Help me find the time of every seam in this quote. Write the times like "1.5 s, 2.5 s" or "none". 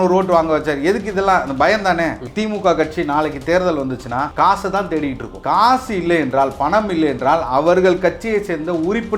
2.3 s, 4.3 s, 5.3 s